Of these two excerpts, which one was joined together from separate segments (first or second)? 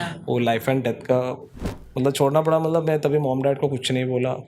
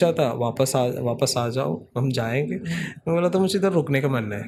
first